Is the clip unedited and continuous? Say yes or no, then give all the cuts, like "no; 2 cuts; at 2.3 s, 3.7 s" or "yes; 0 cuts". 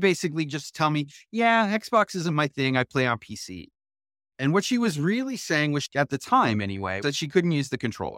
yes; 0 cuts